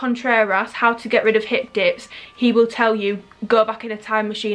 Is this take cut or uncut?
uncut